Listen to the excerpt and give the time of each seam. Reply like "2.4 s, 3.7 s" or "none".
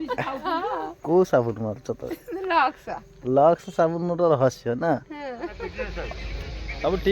5.9 s